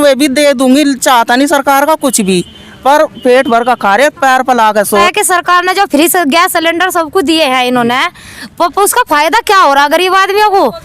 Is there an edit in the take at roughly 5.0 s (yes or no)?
yes